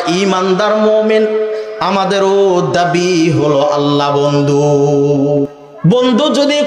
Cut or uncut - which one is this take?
cut